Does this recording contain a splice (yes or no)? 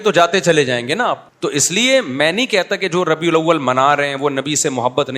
yes